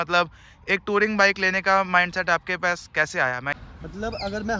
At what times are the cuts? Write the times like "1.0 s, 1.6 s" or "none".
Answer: 3.6 s